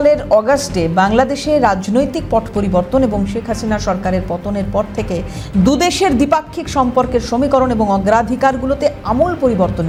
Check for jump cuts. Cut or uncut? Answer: uncut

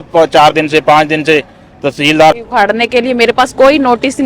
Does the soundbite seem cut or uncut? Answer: cut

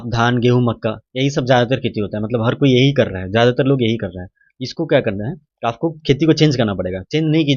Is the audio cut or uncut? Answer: uncut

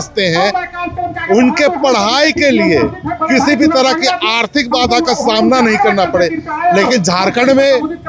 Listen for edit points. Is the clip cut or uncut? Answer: uncut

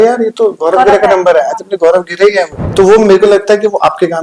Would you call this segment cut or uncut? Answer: cut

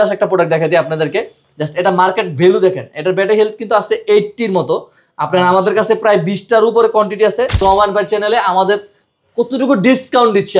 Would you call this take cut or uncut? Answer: cut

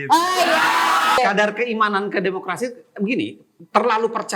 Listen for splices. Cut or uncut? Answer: cut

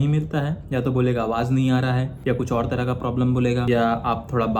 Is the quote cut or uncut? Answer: uncut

